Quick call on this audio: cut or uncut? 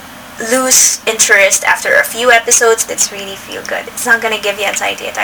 cut